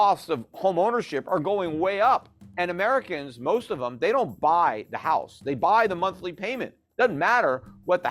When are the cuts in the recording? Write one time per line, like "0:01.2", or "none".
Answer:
0:02.4